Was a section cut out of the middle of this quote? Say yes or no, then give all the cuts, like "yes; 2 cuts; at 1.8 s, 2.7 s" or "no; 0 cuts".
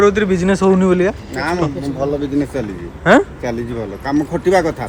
no; 0 cuts